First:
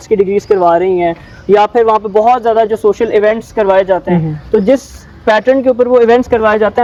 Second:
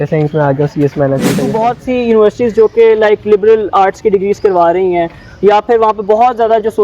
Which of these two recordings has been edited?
second; 1 cut; at 1.5 s

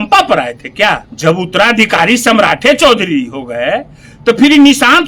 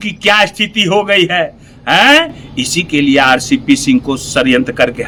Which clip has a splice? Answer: first; 1 cut; at 1.1 s

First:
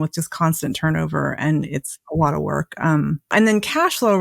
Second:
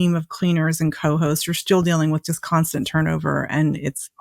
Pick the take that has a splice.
first; 1 cut; at 3.3 s

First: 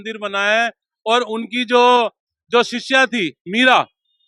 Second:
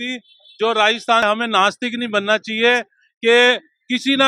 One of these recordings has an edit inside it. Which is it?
second; 1 cut; at 1.2 s

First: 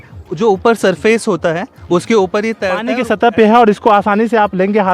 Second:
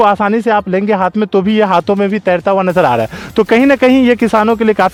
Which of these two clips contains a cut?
first; 1 cut; at 2.9 s

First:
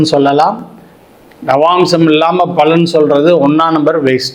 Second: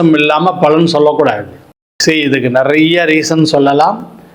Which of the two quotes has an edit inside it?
second; 1 cut; at 1.9 s

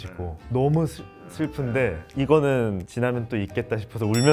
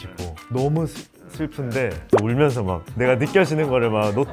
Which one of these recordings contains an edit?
second; 1 cut; at 2.0 s

